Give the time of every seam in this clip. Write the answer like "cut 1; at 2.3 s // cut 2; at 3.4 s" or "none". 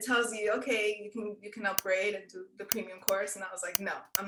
none